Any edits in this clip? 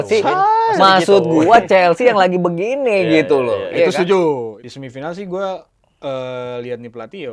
yes; 1 cut; at 4.6 s

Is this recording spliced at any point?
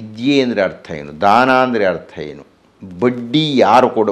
no; 0 cuts

